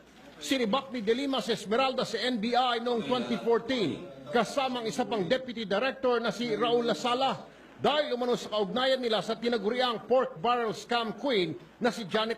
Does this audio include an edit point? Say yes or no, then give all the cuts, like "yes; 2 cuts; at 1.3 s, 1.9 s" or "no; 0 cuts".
yes; 1 cut; at 9.4 s